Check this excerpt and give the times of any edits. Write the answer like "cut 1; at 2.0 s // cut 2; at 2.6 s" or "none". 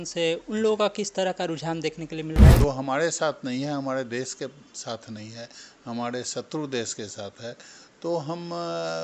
cut 1; at 2.6 s